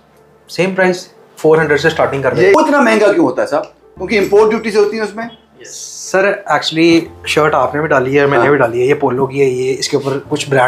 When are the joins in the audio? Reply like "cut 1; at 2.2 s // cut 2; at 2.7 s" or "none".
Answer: cut 1; at 2.5 s